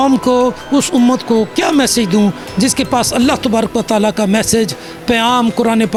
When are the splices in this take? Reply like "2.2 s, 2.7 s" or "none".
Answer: none